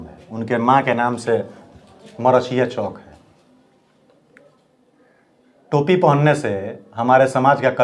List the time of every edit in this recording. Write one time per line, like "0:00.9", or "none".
none